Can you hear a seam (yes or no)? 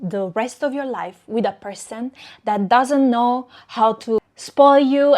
yes